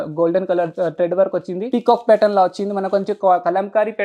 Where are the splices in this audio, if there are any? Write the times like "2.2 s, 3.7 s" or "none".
1.6 s